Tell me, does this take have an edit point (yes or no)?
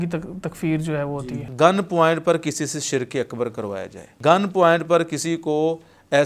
yes